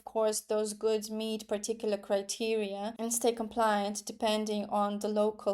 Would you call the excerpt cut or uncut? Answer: cut